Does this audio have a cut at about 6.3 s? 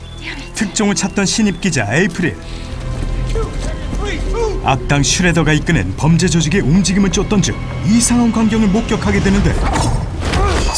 yes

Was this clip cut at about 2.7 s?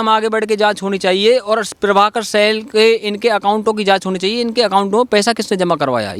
no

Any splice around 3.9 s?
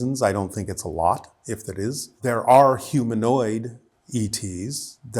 no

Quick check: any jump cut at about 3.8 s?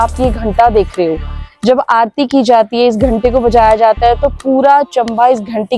no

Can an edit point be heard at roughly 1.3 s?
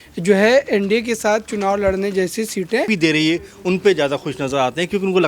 no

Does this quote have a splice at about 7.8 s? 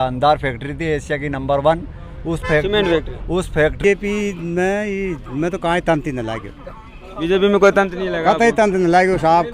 no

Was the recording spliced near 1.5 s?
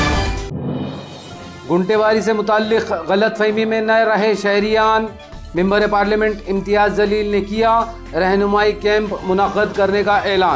no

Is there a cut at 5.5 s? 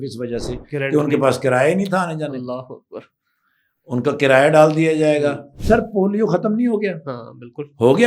yes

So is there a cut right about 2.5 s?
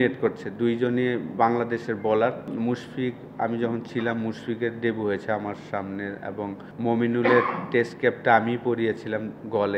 yes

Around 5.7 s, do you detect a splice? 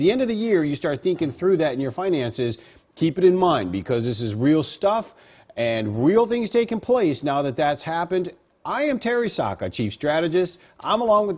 yes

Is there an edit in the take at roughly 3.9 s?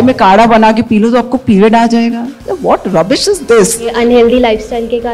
yes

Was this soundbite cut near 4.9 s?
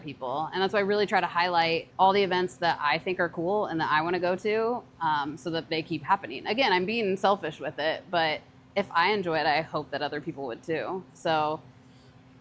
no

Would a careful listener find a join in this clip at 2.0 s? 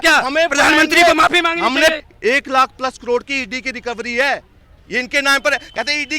yes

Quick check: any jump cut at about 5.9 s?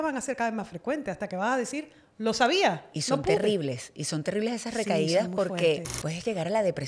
yes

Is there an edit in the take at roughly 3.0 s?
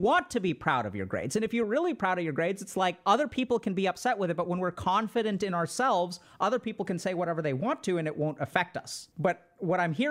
yes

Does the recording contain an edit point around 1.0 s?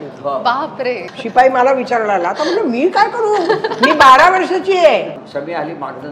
yes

